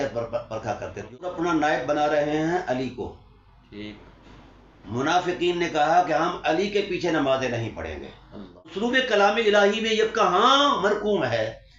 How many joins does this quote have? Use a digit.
2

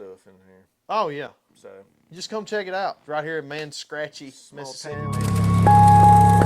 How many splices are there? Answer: 1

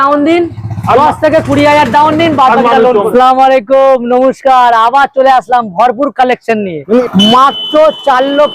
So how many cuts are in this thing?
2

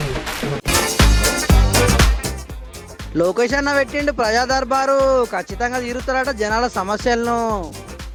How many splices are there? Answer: 0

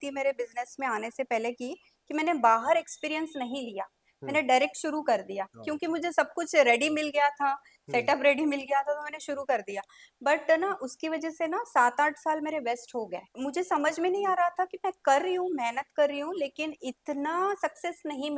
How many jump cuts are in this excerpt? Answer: 0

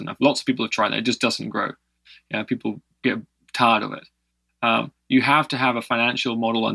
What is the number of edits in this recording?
0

